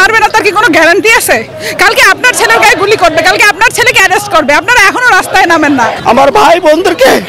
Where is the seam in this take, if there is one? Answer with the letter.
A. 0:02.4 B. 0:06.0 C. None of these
B